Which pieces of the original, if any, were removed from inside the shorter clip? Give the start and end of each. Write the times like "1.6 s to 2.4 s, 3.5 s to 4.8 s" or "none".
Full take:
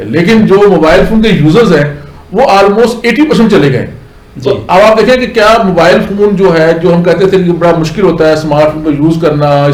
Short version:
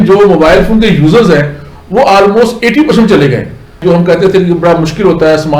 4.2 s to 6.8 s